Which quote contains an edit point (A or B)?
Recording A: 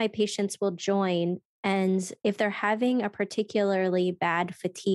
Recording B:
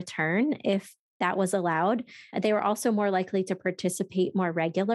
B